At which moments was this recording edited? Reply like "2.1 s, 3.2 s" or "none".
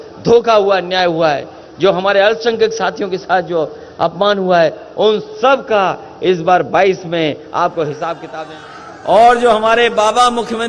8.3 s